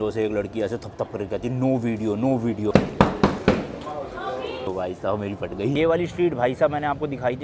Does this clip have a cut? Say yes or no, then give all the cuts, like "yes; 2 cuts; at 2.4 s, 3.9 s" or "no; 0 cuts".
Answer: no; 0 cuts